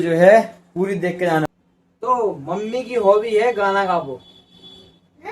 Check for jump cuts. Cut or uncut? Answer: cut